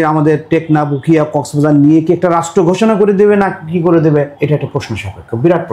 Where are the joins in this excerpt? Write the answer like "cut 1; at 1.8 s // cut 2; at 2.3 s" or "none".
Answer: cut 1; at 4.3 s